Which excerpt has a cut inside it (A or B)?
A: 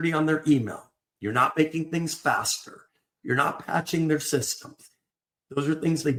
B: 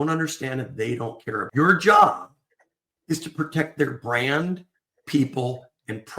B